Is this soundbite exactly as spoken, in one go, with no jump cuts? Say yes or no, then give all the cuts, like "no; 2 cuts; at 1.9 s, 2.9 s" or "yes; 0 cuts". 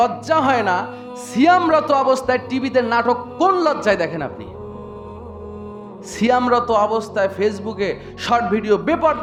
yes; 0 cuts